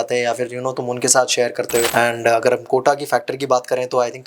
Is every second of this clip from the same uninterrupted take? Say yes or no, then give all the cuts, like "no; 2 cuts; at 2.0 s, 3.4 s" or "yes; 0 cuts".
no; 1 cut; at 1.9 s